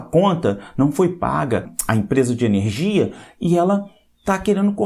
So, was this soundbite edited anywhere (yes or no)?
yes